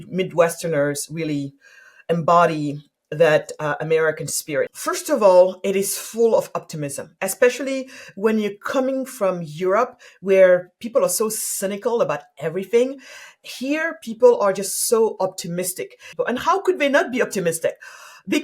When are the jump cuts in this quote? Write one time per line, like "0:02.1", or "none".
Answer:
0:04.9
0:16.0